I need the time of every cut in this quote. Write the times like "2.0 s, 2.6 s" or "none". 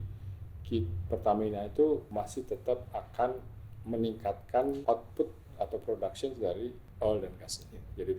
2.1 s, 4.8 s, 6.8 s